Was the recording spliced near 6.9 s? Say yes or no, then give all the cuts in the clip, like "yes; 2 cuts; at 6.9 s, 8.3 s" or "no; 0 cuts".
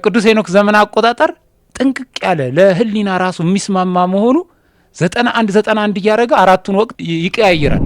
yes; 1 cut; at 6.9 s